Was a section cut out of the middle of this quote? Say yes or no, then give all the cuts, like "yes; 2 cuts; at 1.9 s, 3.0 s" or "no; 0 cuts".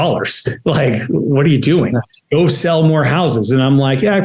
no; 0 cuts